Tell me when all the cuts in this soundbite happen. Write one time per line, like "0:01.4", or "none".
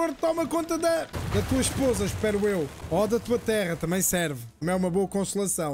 0:01.2
0:02.8
0:04.5

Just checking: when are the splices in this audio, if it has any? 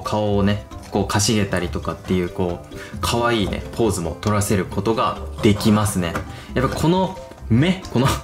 none

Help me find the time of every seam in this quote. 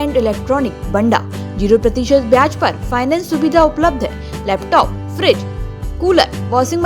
none

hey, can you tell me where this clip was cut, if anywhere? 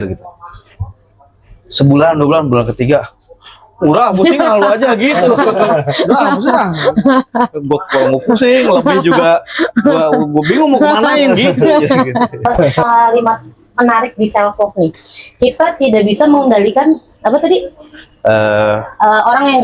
0:12.8

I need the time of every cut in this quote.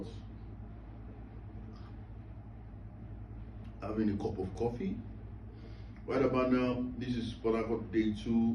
none

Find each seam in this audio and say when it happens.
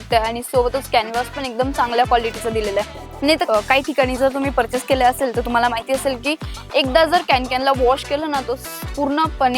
none

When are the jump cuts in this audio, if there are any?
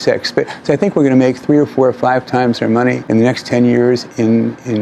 0:03.0

